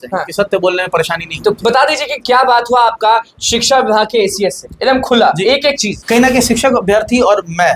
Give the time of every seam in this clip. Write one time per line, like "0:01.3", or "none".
0:05.9